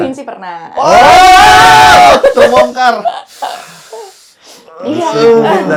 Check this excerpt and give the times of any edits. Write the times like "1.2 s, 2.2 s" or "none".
none